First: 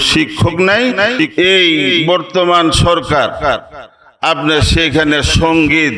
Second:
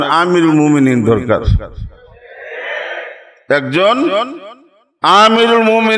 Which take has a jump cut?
first; 1 cut; at 1.2 s

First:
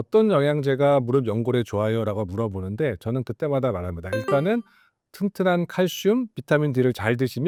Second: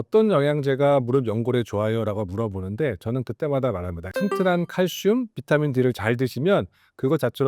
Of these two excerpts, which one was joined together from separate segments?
second; 1 cut; at 3.9 s

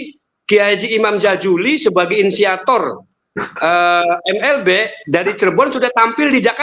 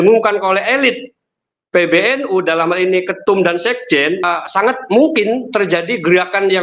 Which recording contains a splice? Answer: second; 1 cut; at 4.2 s

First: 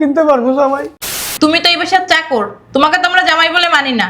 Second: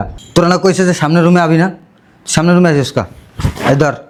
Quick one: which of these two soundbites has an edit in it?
first; 1 cut; at 1.1 s

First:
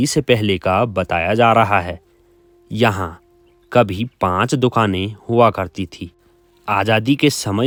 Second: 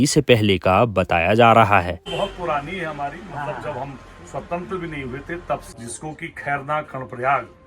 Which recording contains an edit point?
second; 2 cuts; at 2.1 s, 5.7 s

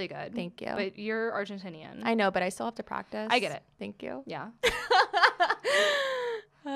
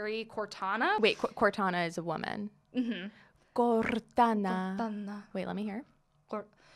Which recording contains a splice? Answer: second; 1 cut; at 1.0 s

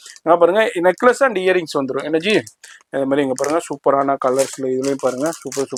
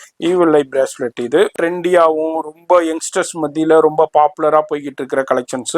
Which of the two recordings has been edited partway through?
second; 1 cut; at 1.5 s

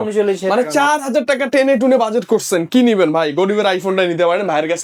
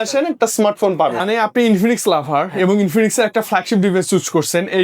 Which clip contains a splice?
second; 1 cut; at 1.2 s

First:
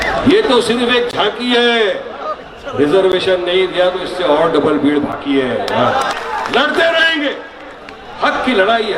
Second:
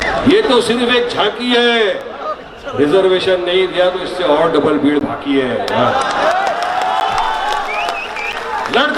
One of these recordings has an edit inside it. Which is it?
first; 1 cut; at 6.1 s

